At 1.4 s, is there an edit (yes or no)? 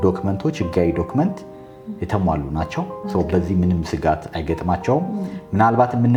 no